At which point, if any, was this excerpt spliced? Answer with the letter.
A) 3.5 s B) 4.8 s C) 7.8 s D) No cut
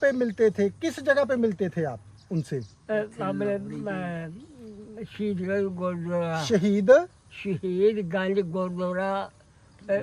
D